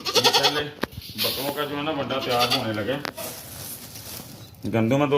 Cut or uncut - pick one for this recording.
cut